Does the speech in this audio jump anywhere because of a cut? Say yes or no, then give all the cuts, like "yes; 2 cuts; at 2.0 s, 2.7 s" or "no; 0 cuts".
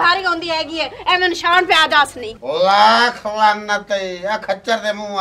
yes; 1 cut; at 2.3 s